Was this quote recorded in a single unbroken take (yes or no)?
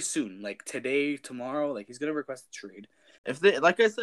no